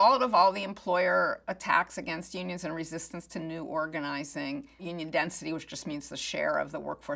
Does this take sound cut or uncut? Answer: cut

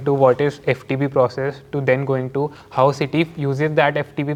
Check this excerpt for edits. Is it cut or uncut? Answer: uncut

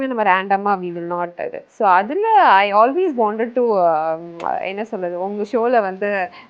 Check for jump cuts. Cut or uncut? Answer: uncut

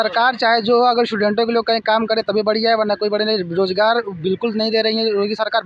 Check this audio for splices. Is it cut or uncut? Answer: uncut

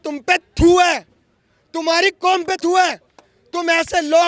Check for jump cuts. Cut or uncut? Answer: uncut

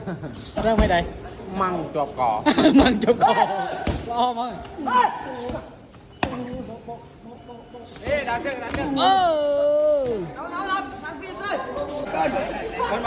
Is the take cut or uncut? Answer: cut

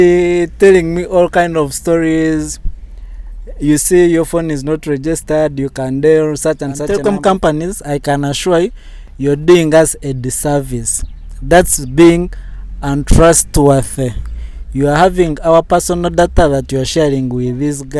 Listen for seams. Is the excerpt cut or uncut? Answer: cut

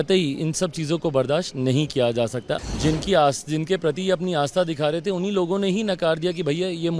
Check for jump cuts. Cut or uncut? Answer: cut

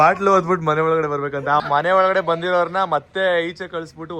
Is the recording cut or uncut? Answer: cut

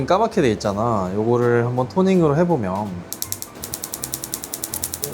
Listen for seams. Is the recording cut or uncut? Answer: cut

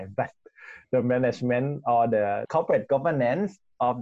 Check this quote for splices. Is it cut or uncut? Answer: uncut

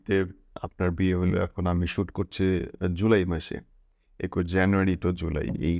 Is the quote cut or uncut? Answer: uncut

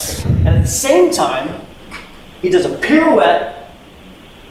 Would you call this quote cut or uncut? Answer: uncut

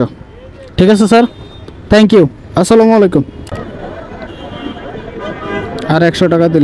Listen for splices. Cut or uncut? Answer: cut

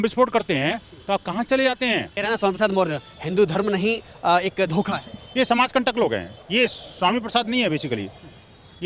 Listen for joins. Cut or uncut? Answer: cut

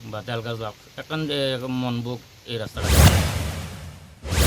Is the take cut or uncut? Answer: cut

